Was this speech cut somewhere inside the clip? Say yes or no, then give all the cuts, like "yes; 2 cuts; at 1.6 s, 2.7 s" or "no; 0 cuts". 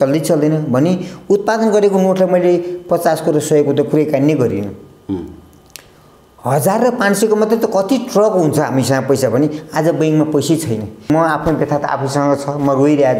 yes; 1 cut; at 11.1 s